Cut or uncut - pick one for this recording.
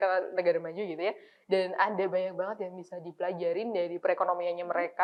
uncut